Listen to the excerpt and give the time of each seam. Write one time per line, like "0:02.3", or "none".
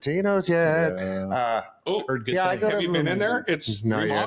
none